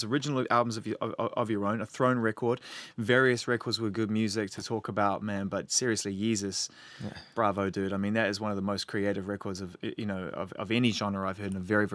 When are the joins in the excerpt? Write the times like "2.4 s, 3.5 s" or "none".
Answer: none

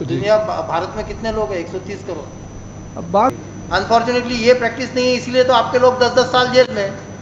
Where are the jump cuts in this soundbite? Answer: 3.3 s

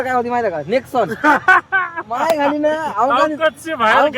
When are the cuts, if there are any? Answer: none

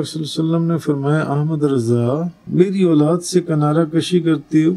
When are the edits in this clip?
2.4 s

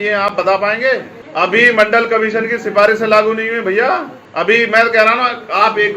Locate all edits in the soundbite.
1.2 s, 4.2 s

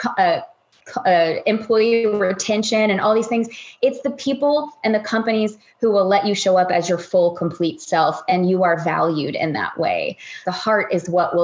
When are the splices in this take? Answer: 10.4 s

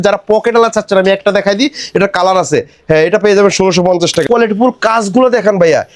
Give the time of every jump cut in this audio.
4.2 s

